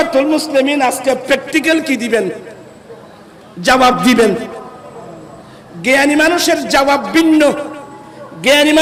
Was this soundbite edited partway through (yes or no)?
no